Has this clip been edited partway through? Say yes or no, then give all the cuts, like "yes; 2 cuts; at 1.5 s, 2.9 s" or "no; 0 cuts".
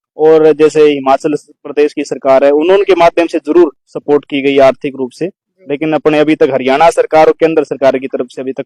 no; 0 cuts